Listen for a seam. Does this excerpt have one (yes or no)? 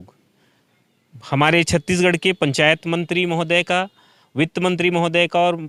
no